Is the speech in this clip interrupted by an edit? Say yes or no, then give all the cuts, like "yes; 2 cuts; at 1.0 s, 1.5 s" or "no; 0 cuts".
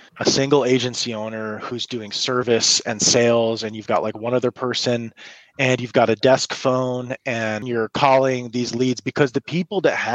yes; 1 cut; at 7.7 s